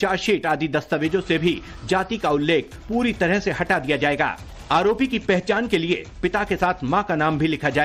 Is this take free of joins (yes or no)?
yes